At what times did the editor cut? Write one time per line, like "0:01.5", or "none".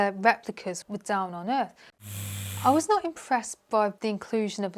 0:00.8
0:02.1
0:04.0